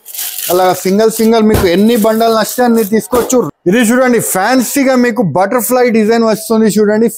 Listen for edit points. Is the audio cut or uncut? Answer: cut